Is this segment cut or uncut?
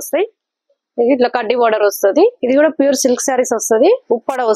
cut